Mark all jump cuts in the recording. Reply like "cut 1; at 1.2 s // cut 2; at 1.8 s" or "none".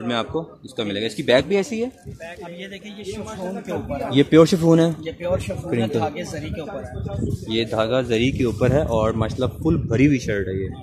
cut 1; at 2.5 s

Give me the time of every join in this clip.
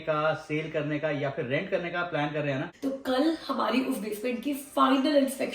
cut 1; at 2.7 s

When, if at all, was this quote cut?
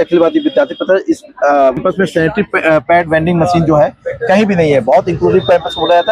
cut 1; at 1.8 s

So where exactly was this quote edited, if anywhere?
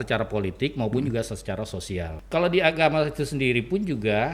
cut 1; at 2.2 s

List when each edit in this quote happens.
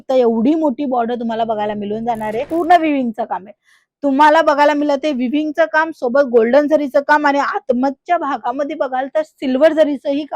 cut 1; at 2.5 s

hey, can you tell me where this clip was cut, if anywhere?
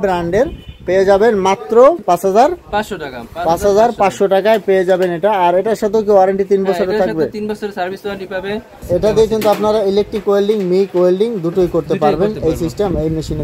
cut 1; at 8.8 s

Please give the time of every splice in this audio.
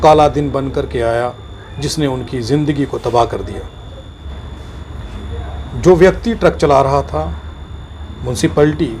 cut 1; at 4.2 s

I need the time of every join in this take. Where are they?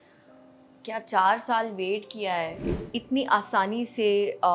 cut 1; at 2.6 s

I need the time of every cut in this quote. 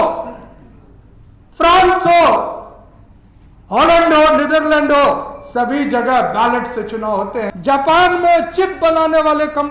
cut 1; at 7.5 s

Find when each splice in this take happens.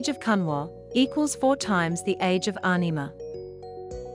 cut 1; at 3.1 s

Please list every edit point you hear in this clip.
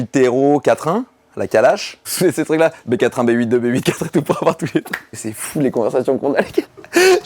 cut 1; at 2.1 s // cut 2; at 5.2 s

